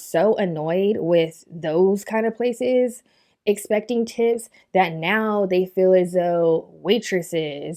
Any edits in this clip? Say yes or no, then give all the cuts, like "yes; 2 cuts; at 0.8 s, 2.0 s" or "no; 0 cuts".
no; 0 cuts